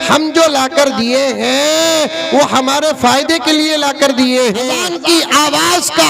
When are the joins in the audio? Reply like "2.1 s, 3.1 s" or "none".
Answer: 4.7 s